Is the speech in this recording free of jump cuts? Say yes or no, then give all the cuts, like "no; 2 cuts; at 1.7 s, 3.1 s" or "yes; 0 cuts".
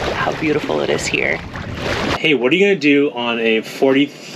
no; 1 cut; at 2.2 s